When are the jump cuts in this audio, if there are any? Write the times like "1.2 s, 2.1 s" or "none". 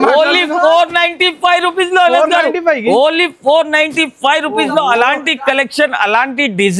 none